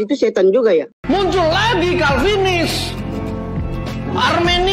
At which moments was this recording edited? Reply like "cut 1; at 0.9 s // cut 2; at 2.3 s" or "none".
cut 1; at 1.0 s